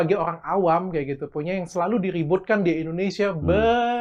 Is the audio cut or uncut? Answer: uncut